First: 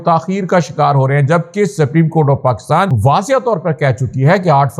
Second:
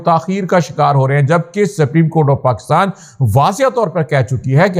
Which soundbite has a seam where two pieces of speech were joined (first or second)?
first